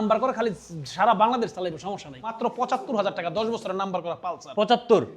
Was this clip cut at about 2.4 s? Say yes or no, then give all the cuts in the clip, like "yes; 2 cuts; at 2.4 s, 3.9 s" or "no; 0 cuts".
yes; 1 cut; at 2.4 s